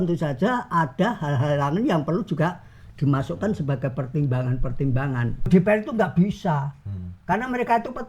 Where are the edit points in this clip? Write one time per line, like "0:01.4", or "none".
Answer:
0:05.5